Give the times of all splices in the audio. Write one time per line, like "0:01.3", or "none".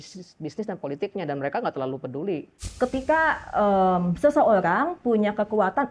0:02.6